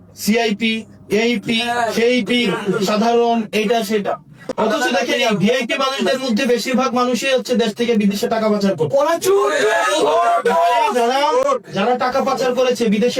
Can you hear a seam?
no; 0 cuts

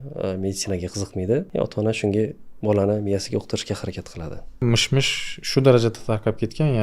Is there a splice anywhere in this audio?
yes; 2 cuts; at 1.5 s, 4.6 s

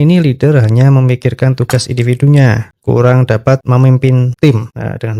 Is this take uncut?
yes; 0 cuts

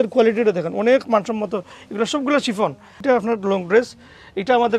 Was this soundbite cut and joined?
yes; 1 cut; at 3.0 s

